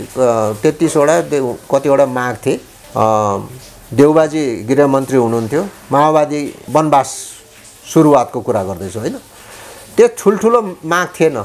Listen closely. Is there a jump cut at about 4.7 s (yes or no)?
no